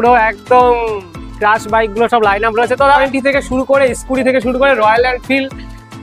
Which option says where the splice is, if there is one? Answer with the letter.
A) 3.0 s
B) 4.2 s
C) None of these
A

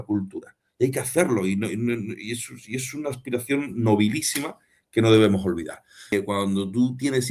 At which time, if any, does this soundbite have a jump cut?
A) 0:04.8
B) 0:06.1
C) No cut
B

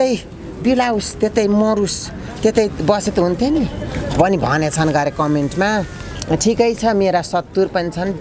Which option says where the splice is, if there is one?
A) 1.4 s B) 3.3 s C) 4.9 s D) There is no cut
D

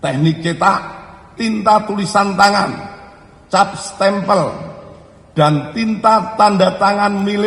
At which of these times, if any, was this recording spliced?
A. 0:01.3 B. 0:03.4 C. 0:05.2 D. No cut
A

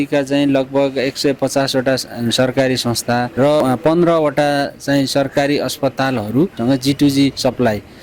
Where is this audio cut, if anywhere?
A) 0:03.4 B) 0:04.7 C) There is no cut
A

